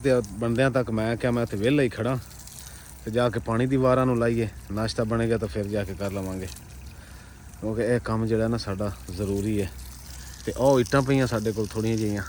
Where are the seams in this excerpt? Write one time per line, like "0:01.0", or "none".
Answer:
none